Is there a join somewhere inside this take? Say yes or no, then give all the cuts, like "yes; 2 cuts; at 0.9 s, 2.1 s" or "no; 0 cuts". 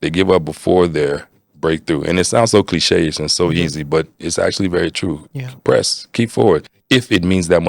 yes; 1 cut; at 6.7 s